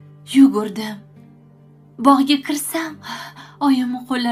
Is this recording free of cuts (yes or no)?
yes